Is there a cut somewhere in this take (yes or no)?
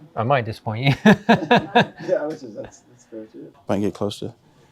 no